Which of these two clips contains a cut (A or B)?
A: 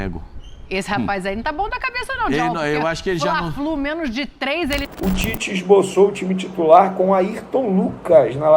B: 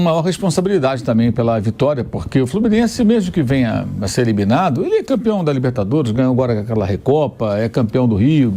A